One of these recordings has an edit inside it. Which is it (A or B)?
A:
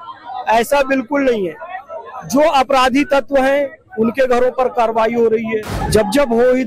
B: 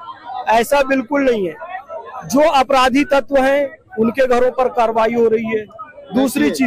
A